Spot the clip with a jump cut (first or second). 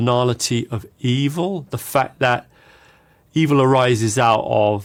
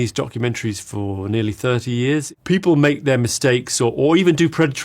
second